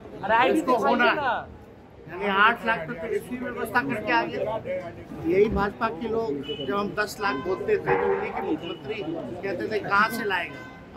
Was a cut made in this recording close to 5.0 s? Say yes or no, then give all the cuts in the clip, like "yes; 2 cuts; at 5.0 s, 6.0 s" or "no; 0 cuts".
yes; 1 cut; at 5.0 s